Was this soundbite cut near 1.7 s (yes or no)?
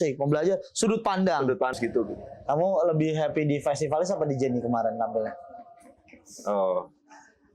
yes